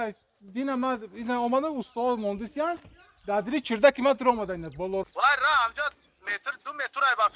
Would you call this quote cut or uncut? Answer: cut